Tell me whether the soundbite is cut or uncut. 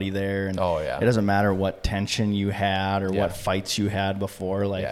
uncut